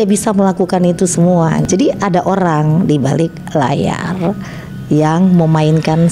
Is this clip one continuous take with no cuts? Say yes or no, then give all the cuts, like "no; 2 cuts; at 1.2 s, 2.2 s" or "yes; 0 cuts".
no; 1 cut; at 1.6 s